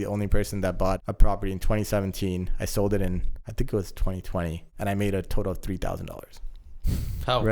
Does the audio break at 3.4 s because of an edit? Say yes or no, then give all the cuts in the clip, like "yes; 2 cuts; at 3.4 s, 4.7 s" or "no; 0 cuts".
yes; 3 cuts; at 1.1 s, 3.4 s, 4.6 s